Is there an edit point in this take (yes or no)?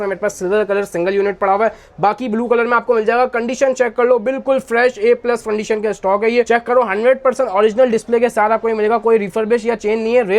no